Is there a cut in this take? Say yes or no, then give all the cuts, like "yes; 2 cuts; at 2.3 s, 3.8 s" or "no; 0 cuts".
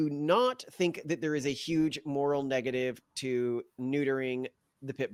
no; 0 cuts